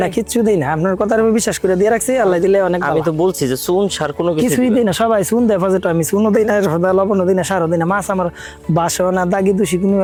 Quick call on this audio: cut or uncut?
uncut